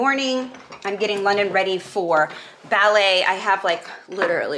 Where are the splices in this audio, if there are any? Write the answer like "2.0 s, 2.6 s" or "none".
none